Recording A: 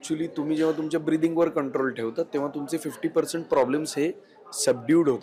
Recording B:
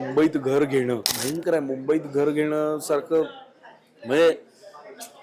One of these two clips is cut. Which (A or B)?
B